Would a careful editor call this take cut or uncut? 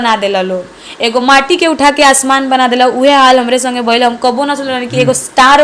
uncut